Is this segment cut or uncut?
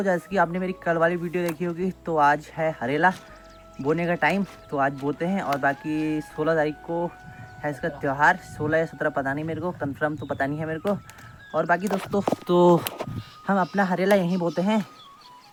uncut